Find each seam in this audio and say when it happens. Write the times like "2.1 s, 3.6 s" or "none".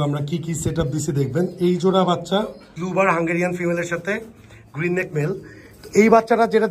2.6 s